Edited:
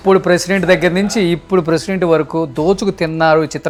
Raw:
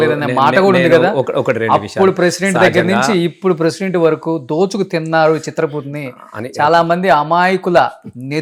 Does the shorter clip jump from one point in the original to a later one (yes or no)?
no